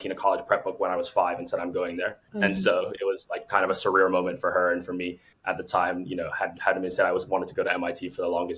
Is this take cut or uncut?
cut